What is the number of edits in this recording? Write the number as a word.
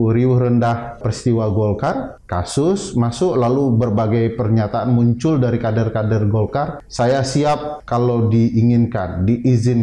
four